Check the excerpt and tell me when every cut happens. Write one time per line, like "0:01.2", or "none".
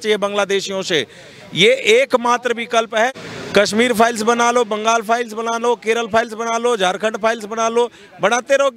0:03.2

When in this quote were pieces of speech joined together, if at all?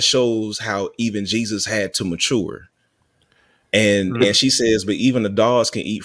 none

